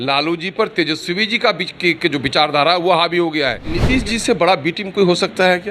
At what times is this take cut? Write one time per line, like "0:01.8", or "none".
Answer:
0:03.8